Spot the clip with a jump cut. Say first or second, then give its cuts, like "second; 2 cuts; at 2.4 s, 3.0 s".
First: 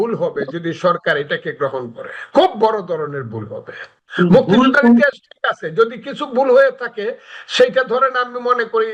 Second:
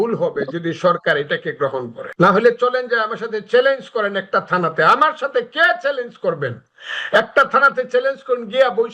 second; 1 cut; at 2.0 s